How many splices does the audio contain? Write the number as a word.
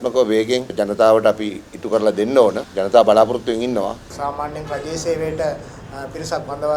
one